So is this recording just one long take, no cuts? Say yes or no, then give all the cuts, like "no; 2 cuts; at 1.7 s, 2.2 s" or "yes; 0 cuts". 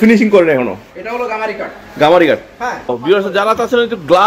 no; 1 cut; at 2.9 s